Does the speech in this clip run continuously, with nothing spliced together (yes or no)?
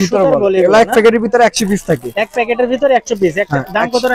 yes